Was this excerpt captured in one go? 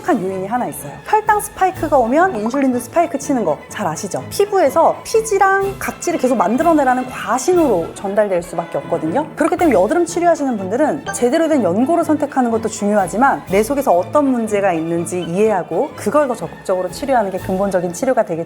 no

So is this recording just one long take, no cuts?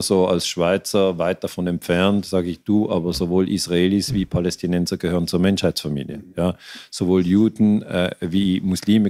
yes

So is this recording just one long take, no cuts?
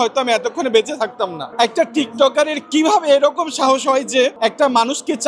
no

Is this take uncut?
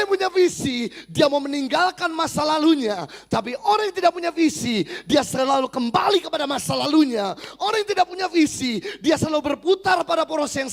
yes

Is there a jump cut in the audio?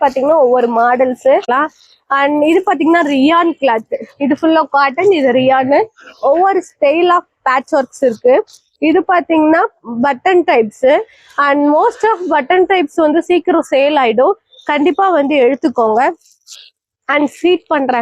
yes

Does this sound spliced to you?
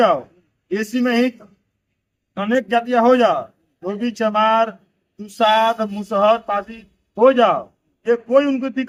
no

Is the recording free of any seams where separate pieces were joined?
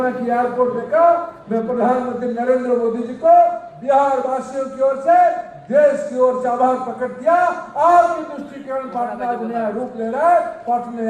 yes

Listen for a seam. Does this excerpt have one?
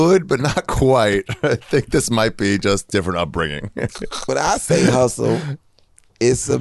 yes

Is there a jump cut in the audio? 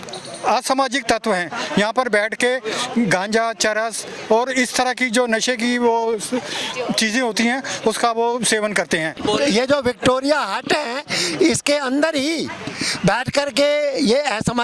yes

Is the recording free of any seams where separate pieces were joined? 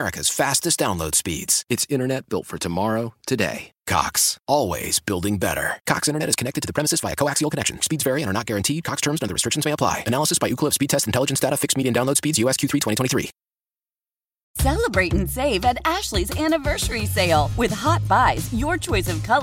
no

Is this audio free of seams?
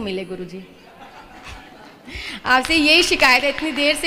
yes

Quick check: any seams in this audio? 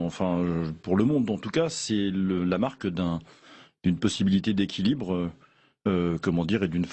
no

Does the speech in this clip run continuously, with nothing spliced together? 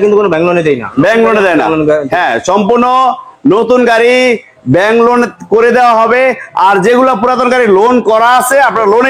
yes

